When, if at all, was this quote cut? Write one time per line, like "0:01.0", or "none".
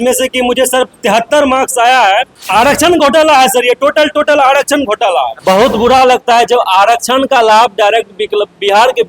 0:02.4
0:05.3